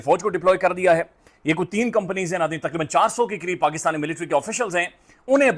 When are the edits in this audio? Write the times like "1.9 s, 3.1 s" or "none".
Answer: none